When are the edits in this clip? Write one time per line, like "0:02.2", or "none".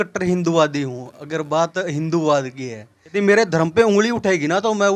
0:03.1